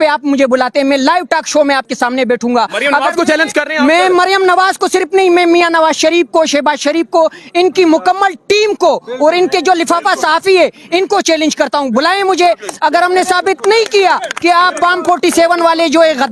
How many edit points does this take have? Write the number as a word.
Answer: zero